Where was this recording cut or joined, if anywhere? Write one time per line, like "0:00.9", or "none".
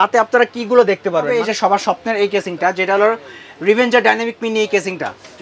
0:01.3